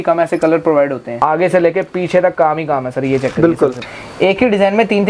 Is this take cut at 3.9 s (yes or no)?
yes